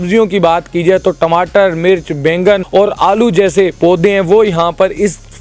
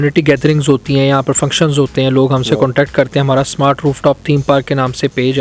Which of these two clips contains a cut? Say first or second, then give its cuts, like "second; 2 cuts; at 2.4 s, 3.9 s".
first; 2 cuts; at 2.6 s, 3.7 s